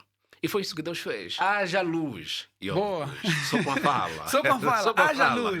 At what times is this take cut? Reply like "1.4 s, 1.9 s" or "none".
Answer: 1.4 s